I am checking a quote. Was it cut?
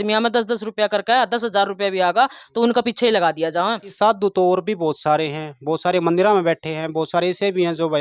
yes; 1 cut; at 3.9 s

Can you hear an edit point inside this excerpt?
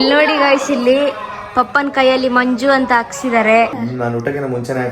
yes; 1 cut; at 3.8 s

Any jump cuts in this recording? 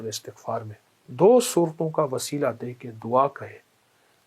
yes; 1 cut; at 1.1 s

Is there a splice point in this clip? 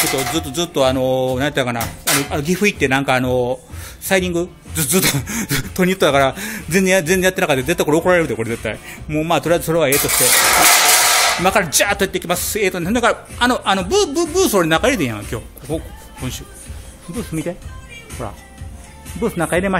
no; 0 cuts

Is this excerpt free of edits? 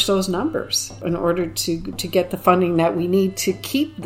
no; 1 cut; at 1.0 s

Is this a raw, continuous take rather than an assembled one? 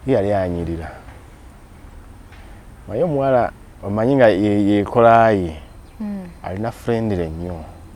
yes; 0 cuts

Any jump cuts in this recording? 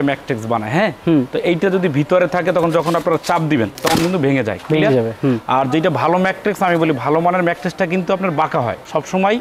no; 0 cuts

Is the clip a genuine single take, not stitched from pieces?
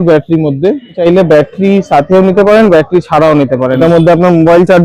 no; 2 cuts; at 1.0 s, 3.8 s

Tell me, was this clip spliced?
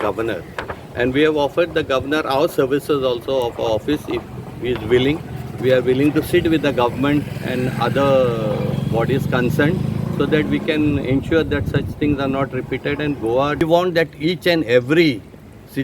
yes; 1 cut; at 13.6 s

